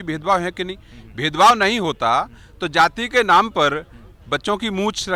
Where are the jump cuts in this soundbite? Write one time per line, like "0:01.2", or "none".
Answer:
none